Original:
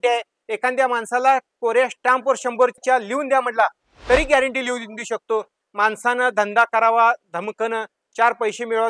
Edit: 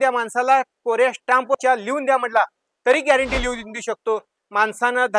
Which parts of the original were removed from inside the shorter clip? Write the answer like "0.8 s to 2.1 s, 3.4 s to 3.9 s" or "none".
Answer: 2.4 s to 2.8 s